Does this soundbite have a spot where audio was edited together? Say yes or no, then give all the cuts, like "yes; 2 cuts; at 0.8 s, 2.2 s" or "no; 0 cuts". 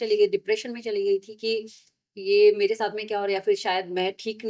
no; 0 cuts